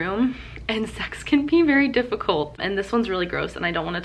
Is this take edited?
yes; 1 cut; at 2.6 s

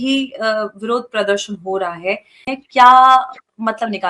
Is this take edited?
yes; 1 cut; at 2.5 s

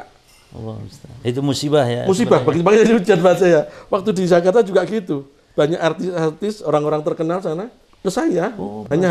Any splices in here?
yes; 1 cut; at 7.8 s

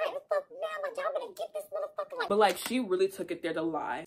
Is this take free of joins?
no; 1 cut; at 2.3 s

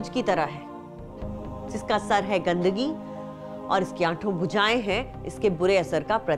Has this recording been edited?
no; 0 cuts

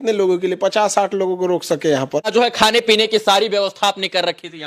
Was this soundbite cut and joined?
yes; 1 cut; at 2.3 s

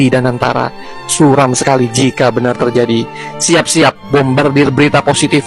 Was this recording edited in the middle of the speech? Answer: no; 0 cuts

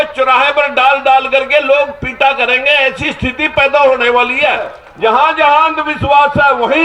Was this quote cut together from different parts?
yes; 1 cut; at 4.8 s

